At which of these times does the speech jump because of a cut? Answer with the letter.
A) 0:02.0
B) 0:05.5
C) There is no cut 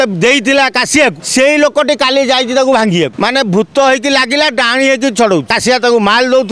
B